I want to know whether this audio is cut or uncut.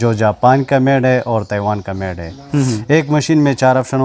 uncut